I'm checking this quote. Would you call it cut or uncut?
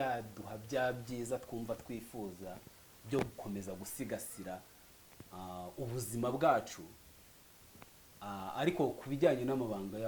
uncut